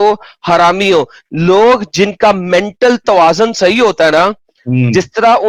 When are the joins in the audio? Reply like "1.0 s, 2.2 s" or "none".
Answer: none